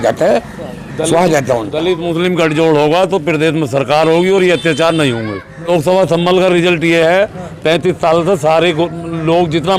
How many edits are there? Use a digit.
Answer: 1